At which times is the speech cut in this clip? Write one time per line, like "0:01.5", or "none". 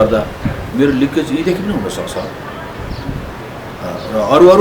none